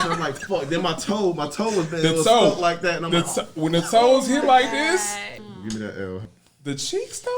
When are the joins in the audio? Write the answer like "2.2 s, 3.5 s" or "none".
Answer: 5.3 s, 6.3 s